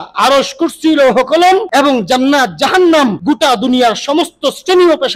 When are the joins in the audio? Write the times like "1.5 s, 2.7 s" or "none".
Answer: 1.7 s, 3.2 s